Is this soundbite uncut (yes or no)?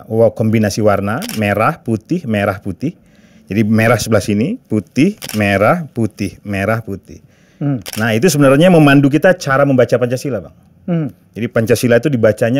yes